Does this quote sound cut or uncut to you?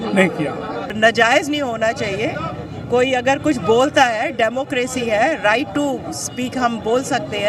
cut